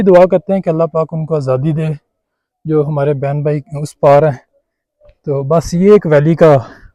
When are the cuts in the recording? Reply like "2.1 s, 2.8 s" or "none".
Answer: none